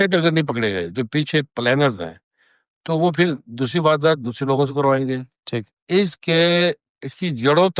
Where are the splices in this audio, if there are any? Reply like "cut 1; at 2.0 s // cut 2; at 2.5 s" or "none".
none